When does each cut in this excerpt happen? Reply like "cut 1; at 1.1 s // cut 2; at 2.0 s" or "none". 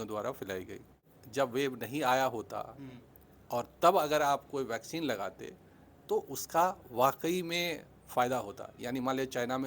cut 1; at 1.1 s